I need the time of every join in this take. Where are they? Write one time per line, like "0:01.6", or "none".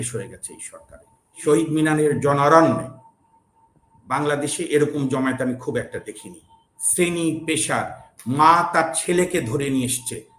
0:01.4